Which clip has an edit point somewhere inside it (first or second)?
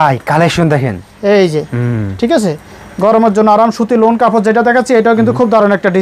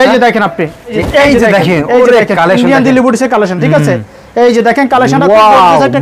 second